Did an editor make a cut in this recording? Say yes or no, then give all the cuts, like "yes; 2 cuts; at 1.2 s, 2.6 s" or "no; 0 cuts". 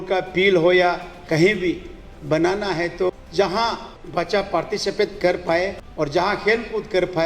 yes; 3 cuts; at 3.1 s, 3.9 s, 5.8 s